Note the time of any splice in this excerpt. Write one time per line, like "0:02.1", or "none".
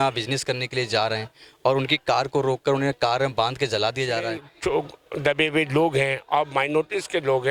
0:04.4